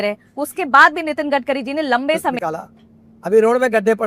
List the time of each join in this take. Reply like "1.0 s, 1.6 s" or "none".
2.4 s